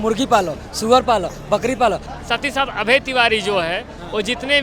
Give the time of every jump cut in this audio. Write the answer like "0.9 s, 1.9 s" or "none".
2.1 s